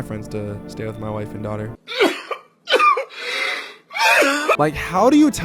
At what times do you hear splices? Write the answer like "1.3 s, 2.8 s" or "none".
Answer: 1.8 s, 4.6 s